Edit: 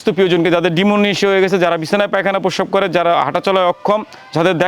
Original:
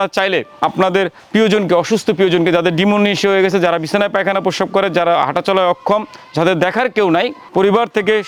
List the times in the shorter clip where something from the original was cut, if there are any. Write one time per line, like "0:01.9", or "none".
none